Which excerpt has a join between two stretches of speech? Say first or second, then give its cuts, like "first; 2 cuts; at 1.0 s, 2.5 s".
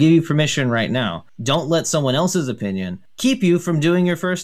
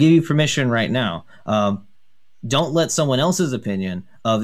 first; 2 cuts; at 1.3 s, 3.1 s